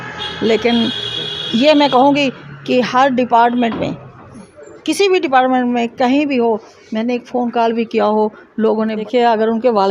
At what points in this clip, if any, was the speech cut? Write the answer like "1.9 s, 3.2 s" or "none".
9.0 s